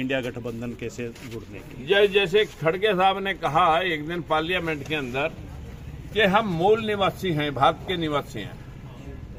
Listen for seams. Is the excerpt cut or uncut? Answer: uncut